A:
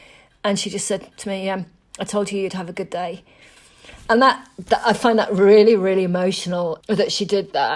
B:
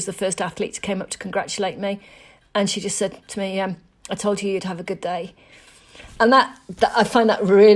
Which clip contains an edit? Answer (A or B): A